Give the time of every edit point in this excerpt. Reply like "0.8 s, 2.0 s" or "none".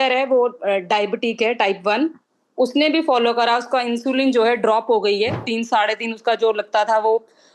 none